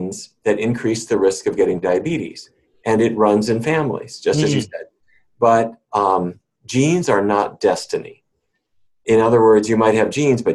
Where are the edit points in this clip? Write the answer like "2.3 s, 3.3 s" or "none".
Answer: none